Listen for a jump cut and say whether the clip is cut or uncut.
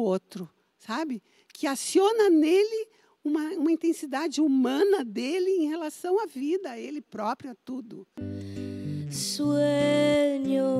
cut